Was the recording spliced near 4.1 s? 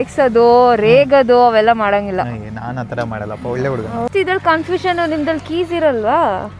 yes; 1 cut; at 4.1 s

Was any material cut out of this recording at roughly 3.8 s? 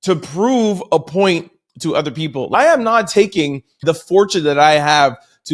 yes; 2 cuts; at 2.5 s, 3.8 s

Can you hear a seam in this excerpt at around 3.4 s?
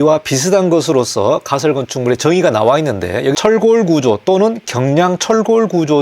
yes; 1 cut; at 3.4 s

